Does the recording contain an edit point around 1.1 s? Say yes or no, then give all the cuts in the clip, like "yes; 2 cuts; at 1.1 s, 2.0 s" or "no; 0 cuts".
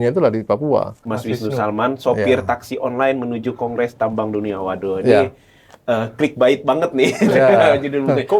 yes; 1 cut; at 1.1 s